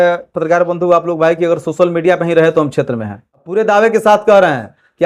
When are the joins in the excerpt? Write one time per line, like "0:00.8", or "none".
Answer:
0:03.5